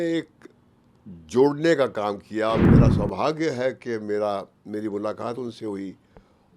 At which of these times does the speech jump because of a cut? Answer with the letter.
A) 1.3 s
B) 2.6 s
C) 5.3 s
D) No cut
B